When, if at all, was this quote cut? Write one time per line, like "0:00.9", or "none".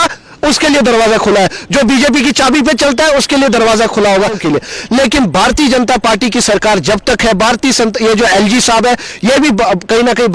0:04.4